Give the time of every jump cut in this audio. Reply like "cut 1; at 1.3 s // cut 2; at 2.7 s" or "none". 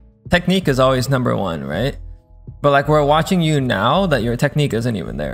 none